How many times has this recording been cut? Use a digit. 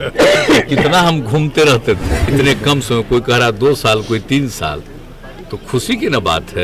1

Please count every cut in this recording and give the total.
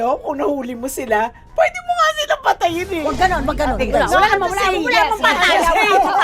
1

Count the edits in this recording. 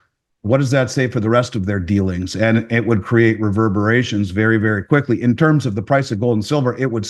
0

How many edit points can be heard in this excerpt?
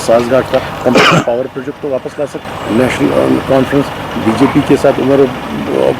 1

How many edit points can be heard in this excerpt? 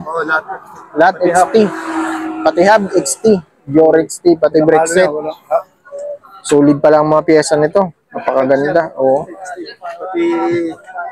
0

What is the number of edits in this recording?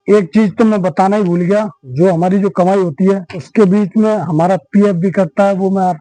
2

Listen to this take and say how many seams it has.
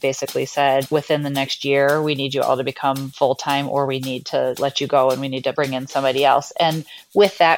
4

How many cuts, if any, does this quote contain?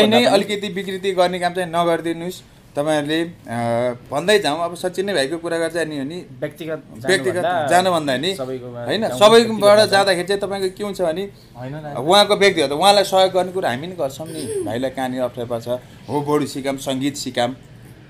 1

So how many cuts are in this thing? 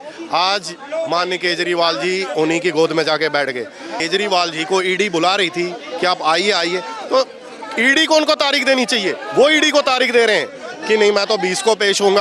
1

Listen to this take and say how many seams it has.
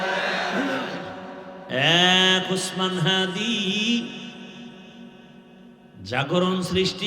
1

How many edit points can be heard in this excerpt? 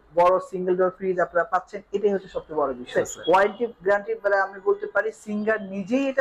1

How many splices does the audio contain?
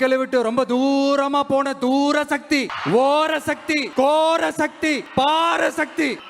3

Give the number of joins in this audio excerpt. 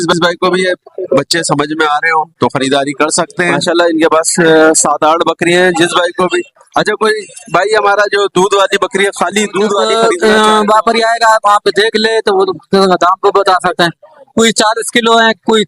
2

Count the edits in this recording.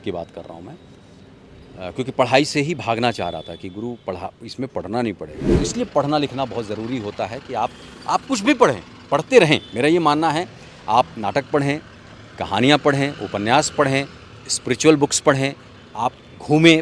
1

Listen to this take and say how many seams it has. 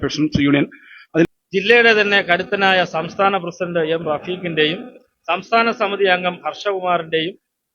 1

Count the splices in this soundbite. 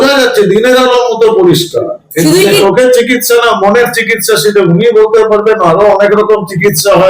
1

